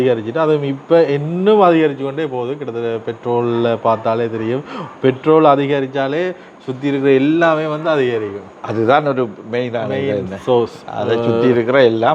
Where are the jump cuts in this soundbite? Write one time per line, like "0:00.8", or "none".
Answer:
none

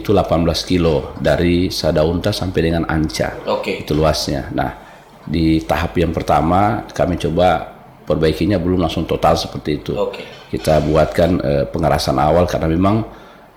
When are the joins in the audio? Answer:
none

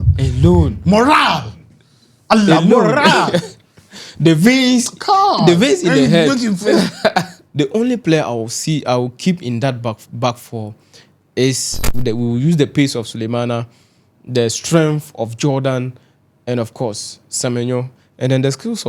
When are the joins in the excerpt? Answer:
0:07.4
0:11.7

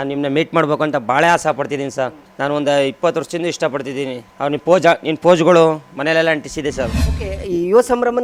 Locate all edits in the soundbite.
0:02.2
0:04.2
0:07.0

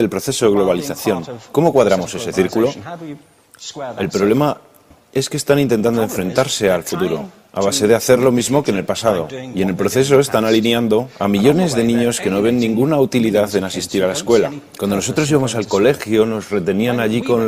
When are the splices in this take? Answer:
0:08.8

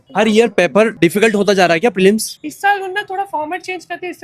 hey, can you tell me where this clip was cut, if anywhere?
0:00.9
0:02.4

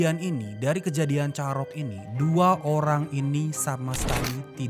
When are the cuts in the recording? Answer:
none

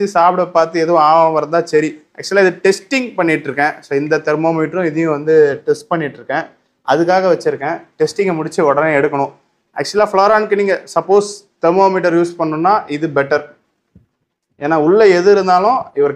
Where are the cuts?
none

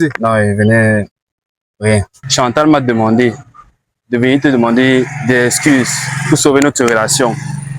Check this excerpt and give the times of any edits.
0:02.2

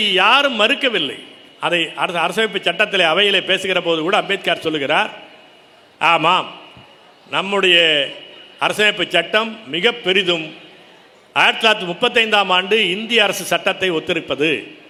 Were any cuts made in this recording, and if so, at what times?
none

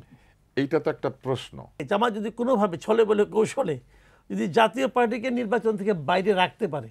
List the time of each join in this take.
0:01.8

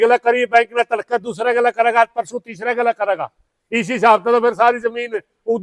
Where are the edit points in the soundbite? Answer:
none

